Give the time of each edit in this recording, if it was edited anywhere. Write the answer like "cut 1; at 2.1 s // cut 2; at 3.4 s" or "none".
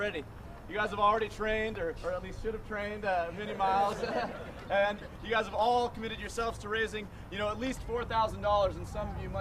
cut 1; at 7.6 s